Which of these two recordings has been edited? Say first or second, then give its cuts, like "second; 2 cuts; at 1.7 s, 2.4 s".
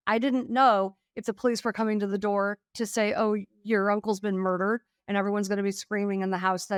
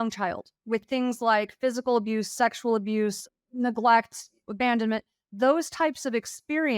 second; 2 cuts; at 3.3 s, 4.4 s